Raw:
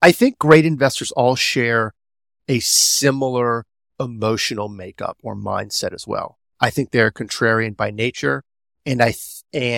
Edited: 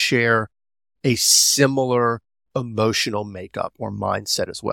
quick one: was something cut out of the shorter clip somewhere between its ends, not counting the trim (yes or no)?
no